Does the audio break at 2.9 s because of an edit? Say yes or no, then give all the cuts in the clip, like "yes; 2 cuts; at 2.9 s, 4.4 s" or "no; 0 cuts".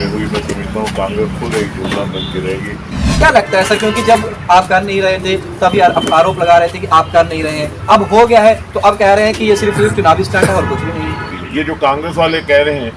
yes; 2 cuts; at 2.9 s, 11.3 s